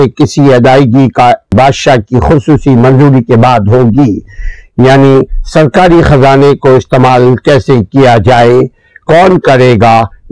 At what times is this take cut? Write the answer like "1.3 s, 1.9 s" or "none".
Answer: 1.5 s